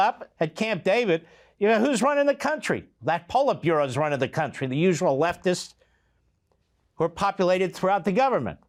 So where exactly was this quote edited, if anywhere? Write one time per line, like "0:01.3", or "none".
none